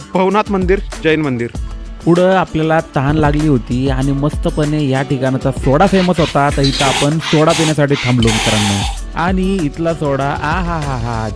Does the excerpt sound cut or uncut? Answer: uncut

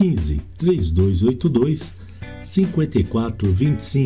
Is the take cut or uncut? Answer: uncut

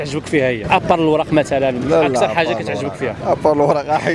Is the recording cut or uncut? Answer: uncut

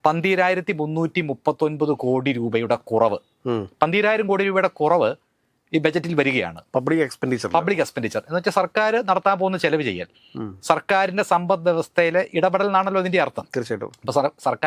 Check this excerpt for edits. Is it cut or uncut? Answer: uncut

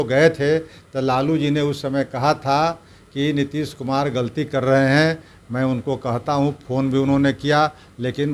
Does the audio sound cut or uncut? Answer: uncut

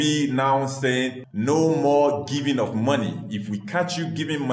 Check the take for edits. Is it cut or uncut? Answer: cut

